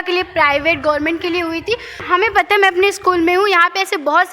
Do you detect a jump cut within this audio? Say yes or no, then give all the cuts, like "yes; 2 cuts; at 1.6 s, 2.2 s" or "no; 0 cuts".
yes; 1 cut; at 2.0 s